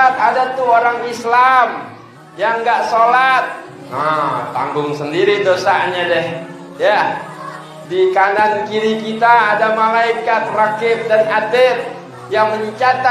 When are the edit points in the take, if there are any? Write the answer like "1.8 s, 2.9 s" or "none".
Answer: none